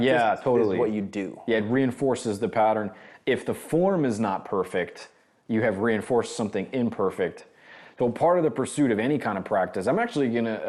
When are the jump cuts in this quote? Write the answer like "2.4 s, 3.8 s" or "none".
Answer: none

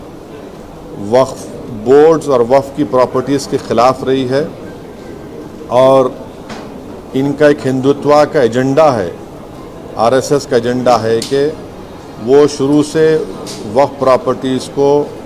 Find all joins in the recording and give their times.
none

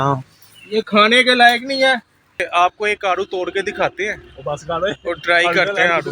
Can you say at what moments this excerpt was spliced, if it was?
2.5 s

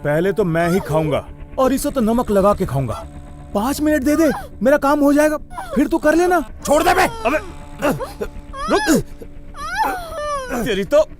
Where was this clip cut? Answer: 6.6 s

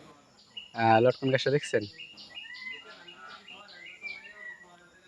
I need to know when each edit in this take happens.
2.9 s

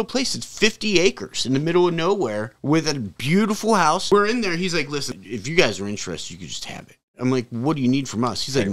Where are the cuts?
4.0 s, 5.1 s

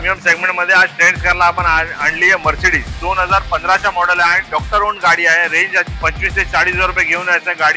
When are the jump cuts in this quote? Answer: 2.9 s, 5.9 s

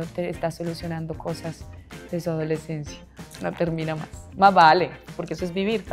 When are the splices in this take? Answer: 3.3 s

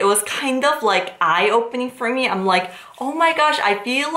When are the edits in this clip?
none

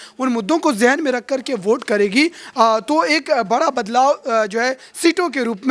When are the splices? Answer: none

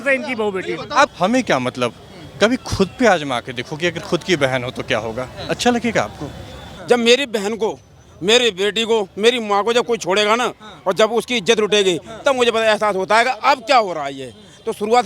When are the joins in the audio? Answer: 1.1 s, 6.7 s

